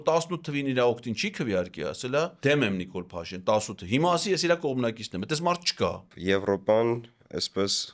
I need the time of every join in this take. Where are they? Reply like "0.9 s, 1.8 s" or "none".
2.3 s, 6.1 s